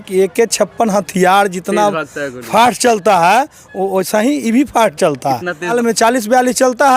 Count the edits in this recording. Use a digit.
1